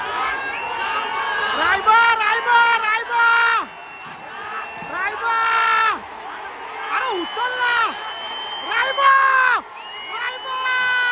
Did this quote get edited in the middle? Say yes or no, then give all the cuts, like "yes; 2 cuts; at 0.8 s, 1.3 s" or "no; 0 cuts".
no; 0 cuts